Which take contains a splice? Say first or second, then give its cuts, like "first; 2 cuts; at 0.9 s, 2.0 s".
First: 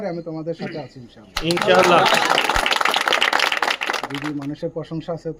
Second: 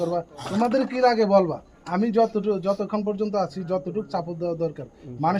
first; 1 cut; at 4.1 s